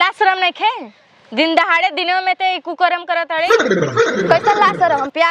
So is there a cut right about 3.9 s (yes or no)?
no